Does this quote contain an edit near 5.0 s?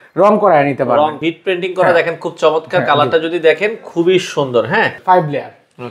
yes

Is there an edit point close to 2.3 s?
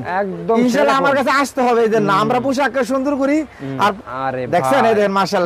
no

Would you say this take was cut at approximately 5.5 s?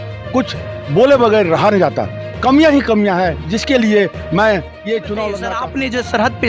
yes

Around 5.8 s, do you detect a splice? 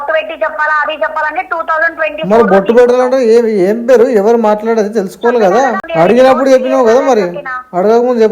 yes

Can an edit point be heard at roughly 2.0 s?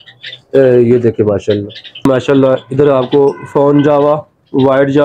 yes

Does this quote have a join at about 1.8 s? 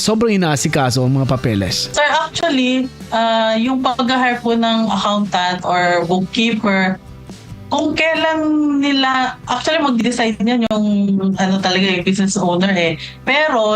yes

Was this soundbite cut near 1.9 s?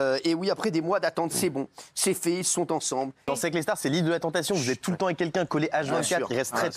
no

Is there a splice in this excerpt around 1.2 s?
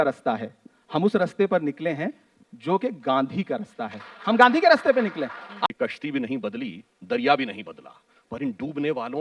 no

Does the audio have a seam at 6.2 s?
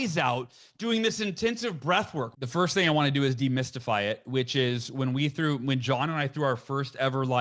no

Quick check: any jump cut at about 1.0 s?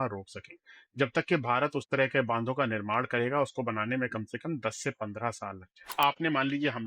no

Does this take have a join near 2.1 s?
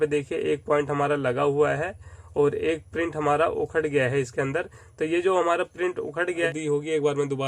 no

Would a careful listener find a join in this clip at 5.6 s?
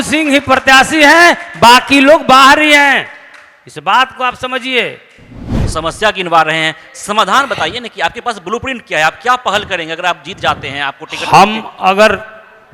yes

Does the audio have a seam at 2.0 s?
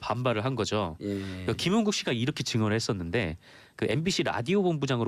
yes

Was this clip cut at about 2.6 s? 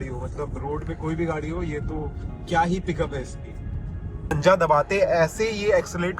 no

